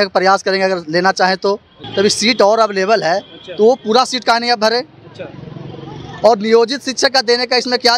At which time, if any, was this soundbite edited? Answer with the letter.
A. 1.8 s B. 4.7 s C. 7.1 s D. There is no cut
A